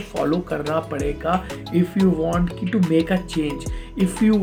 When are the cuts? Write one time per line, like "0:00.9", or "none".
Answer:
none